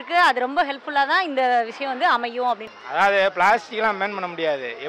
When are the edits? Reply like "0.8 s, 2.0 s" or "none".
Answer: 2.7 s